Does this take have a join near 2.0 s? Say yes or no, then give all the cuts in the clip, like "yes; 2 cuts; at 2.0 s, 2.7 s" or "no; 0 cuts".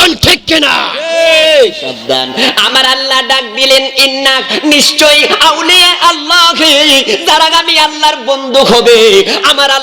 yes; 1 cut; at 2.0 s